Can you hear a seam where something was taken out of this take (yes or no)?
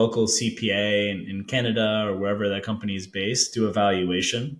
no